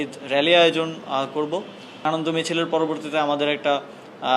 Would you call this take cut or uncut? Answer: cut